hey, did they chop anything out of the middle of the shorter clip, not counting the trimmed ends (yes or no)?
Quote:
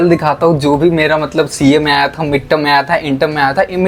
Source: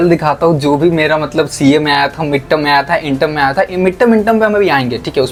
no